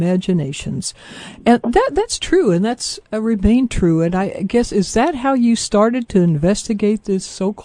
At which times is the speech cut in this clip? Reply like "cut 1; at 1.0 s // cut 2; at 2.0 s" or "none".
cut 1; at 3.4 s